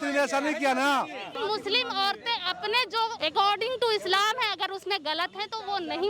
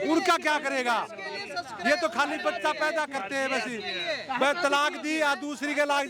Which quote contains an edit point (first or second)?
first